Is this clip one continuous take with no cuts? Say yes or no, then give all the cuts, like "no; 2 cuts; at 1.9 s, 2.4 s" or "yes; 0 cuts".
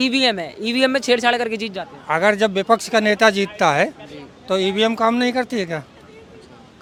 yes; 0 cuts